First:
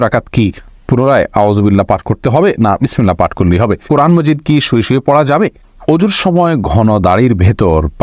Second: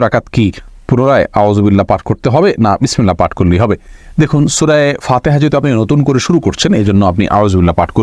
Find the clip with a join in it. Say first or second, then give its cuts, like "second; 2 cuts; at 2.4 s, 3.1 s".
first; 2 cuts; at 3.8 s, 5.7 s